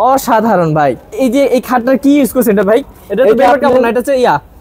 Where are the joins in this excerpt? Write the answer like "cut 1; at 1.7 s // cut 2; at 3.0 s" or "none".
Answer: cut 1; at 1.1 s